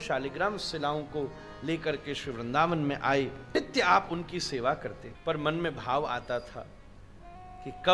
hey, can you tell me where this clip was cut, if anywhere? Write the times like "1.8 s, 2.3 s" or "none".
3.4 s, 5.0 s